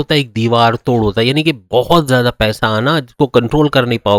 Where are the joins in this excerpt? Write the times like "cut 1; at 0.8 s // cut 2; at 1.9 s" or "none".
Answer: none